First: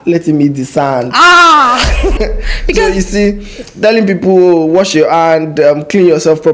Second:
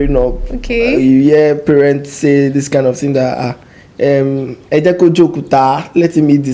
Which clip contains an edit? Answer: first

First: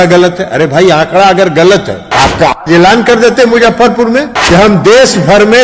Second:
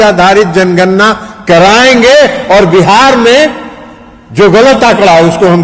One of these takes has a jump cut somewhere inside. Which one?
first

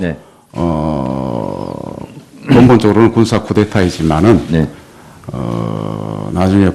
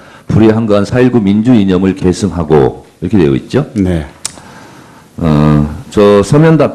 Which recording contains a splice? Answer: first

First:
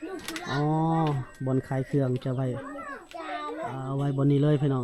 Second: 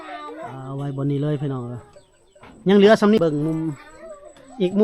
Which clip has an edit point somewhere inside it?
second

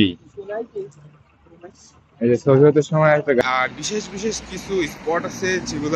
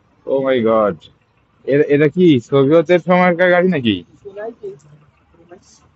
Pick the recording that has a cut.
first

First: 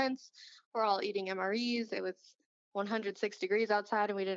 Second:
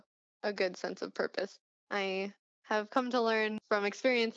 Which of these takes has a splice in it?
second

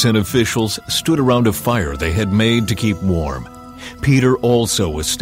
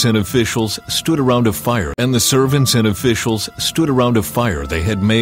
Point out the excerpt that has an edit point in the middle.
first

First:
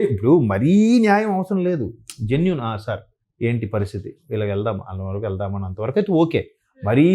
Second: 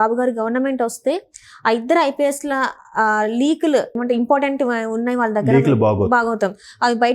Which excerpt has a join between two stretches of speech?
second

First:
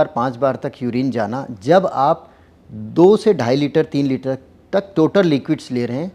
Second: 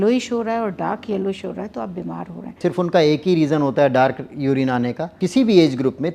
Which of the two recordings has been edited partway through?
second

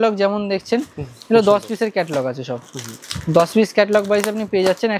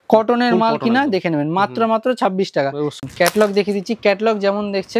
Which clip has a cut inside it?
second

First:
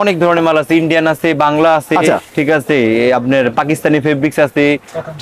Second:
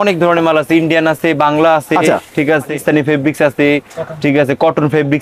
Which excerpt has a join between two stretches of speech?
second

